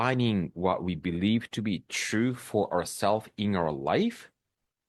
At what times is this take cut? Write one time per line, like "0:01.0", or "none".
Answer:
none

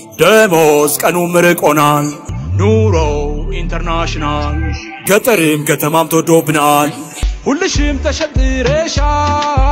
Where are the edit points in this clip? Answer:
none

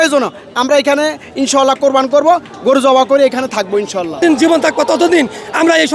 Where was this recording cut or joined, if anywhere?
0:04.2

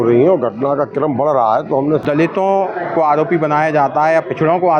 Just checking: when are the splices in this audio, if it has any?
0:02.0

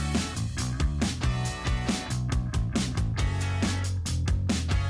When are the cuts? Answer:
0:02.4

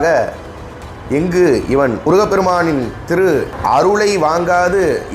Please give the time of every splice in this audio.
0:02.1
0:03.5

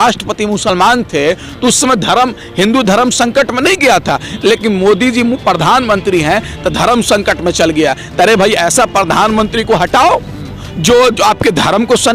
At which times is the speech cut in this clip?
none

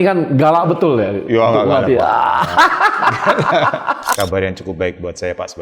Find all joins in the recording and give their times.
0:04.1

